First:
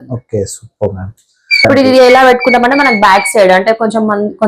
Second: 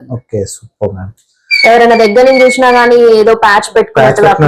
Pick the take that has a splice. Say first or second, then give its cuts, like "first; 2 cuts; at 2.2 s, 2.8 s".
first; 1 cut; at 1.6 s